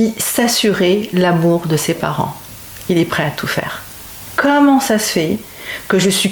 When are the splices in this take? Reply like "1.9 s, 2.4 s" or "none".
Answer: 4.2 s